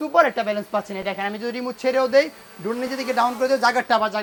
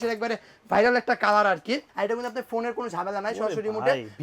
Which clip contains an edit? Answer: second; 1 cut; at 1.9 s

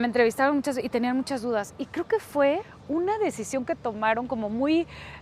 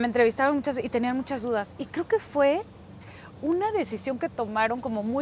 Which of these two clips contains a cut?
first; 1 cut; at 2.7 s

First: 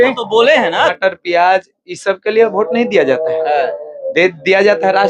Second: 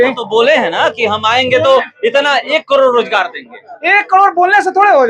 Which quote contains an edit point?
first; 1 cut; at 1.0 s

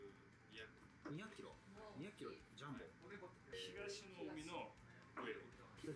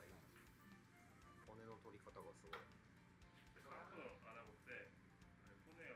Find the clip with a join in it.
second; 2 cuts; at 1.4 s, 3.5 s

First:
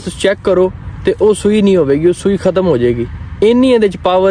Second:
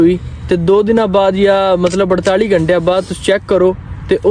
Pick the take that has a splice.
first; 1 cut; at 3.4 s

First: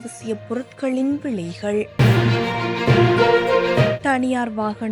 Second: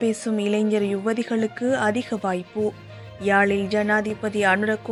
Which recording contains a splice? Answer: first; 2 cuts; at 1.9 s, 4.0 s

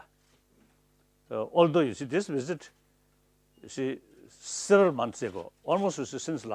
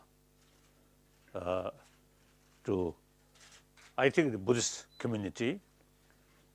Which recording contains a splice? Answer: second; 1 cut; at 4.8 s

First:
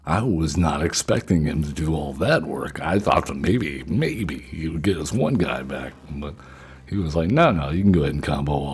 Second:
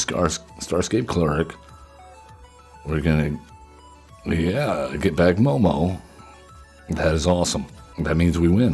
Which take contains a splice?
second; 1 cut; at 7.8 s

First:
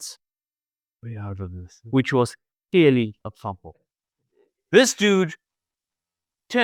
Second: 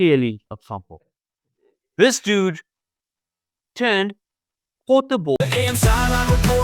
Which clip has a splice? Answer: second; 1 cut; at 5.4 s

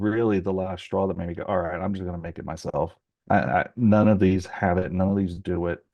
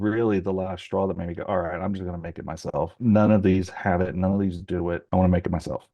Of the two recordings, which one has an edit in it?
second; 2 cuts; at 2.9 s, 5.0 s

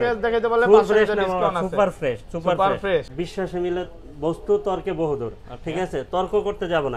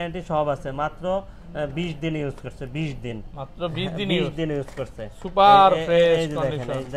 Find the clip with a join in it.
first; 1 cut; at 3.1 s

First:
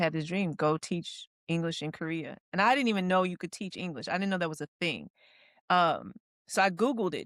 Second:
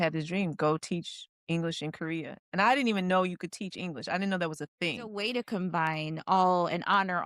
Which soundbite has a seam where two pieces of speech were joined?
second; 1 cut; at 5.2 s

